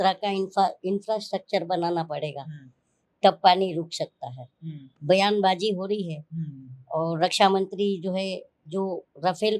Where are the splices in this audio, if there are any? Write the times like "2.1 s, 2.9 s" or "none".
5.0 s